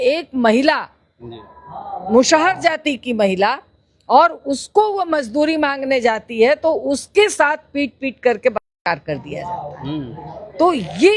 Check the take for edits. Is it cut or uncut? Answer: uncut